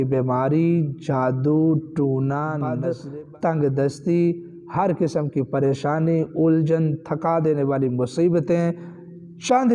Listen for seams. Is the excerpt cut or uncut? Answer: cut